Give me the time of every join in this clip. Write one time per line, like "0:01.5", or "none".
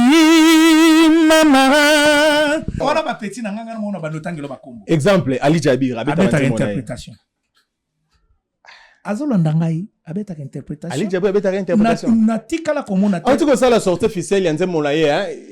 0:02.8

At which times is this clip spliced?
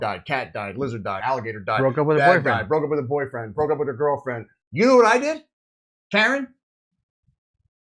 0:01.2
0:04.6

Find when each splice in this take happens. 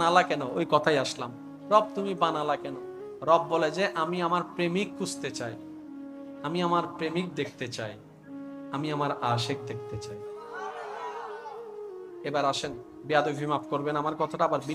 none

